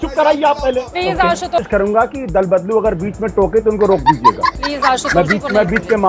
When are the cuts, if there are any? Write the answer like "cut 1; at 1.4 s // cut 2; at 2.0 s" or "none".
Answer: cut 1; at 1.6 s